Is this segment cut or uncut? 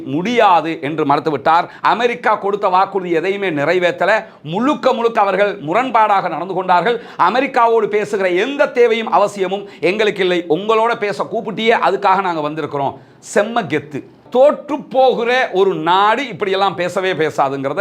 cut